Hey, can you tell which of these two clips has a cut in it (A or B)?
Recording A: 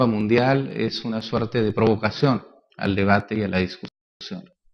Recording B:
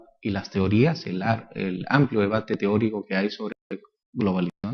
B